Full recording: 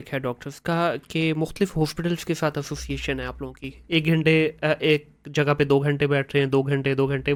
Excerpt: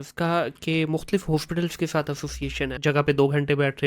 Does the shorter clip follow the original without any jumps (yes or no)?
no